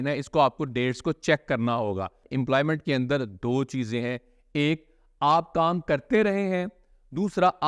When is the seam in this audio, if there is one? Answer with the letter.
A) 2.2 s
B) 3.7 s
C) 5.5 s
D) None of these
A